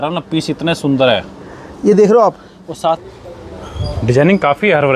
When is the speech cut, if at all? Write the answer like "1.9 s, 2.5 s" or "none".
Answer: 3.0 s